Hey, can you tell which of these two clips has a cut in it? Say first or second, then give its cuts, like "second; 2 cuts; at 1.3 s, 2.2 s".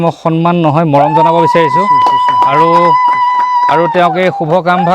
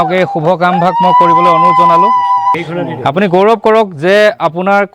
second; 1 cut; at 2.6 s